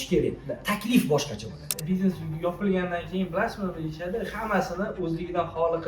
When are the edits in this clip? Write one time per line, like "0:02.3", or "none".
0:01.8